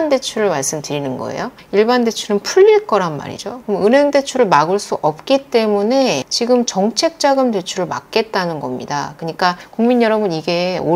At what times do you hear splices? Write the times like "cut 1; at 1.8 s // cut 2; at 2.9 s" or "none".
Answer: cut 1; at 9.6 s